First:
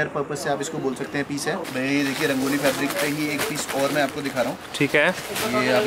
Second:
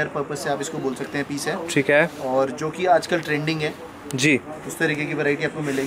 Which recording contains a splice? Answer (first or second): first